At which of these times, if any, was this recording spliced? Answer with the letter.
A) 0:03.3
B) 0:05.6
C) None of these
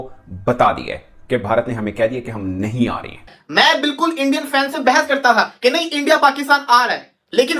A